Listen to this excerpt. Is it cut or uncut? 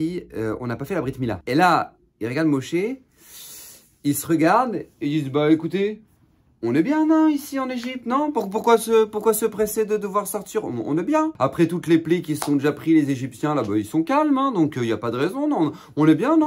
cut